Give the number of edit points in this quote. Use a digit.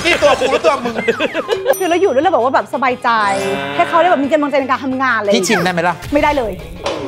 1